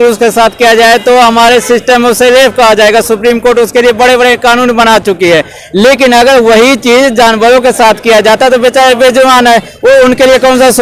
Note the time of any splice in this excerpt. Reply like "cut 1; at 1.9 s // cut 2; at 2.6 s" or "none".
none